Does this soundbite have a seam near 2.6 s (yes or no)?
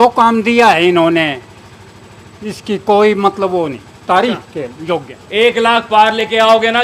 no